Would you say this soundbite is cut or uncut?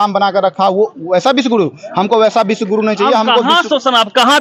uncut